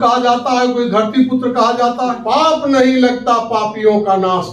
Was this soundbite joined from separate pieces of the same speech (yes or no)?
yes